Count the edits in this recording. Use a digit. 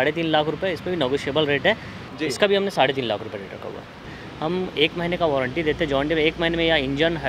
2